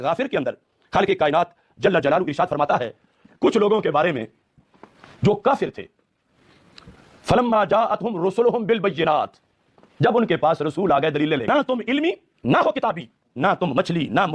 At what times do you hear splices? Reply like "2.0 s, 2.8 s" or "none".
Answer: 11.5 s

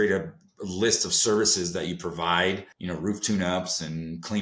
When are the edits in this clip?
2.7 s

